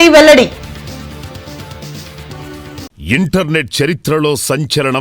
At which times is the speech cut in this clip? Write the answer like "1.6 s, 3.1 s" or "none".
2.9 s

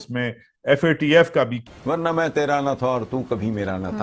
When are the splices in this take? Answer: 1.7 s

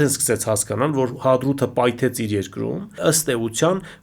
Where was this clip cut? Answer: 3.0 s

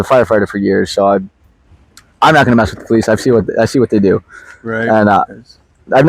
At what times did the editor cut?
none

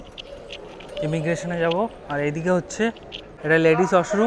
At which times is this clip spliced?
none

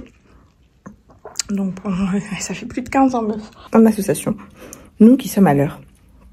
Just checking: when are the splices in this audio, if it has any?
3.5 s

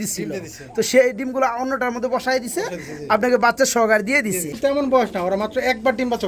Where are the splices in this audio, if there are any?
4.6 s

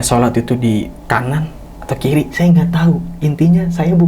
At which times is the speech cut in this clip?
1.0 s

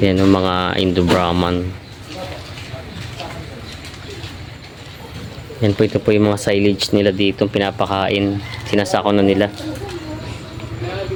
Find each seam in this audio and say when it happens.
none

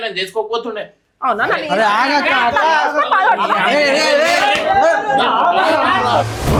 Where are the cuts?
none

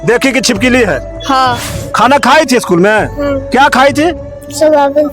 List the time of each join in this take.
1.6 s

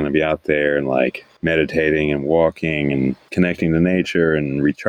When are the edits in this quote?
1.3 s, 3.2 s

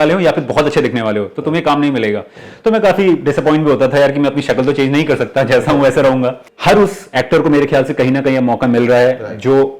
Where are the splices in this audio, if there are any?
6.4 s

